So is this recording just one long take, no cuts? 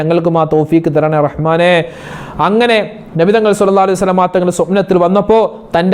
yes; 0 cuts

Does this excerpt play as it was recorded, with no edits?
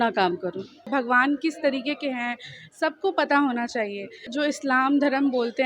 no; 2 cuts; at 0.9 s, 4.3 s

